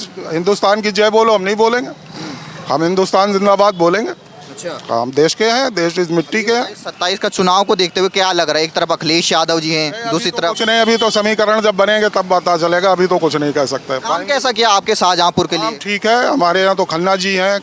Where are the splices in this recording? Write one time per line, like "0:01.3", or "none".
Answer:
none